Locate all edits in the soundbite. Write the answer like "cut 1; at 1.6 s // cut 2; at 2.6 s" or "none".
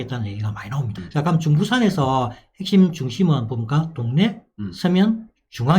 cut 1; at 1.0 s